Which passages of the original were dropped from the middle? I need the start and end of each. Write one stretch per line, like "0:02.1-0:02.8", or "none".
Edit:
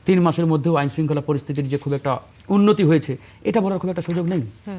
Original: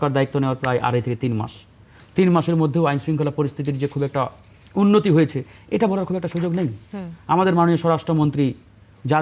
0:04.4-0:04.6